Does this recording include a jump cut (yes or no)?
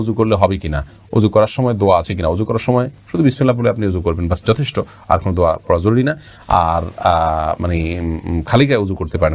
no